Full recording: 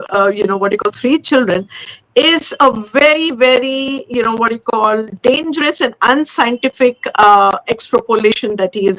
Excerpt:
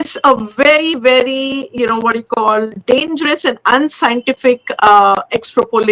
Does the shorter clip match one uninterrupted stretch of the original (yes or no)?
yes